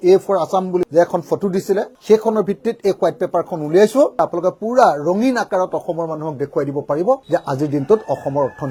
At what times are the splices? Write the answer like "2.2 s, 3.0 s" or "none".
none